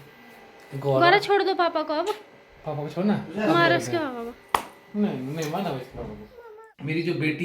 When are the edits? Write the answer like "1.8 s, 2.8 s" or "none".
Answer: 6.4 s